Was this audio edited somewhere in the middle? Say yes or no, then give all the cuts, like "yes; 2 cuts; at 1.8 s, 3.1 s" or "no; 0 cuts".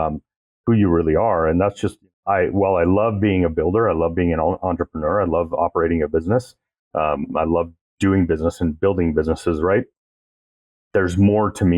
yes; 1 cut; at 2.1 s